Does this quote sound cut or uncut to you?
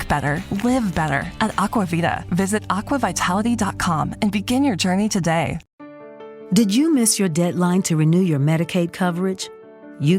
cut